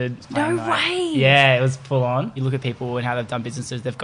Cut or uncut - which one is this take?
cut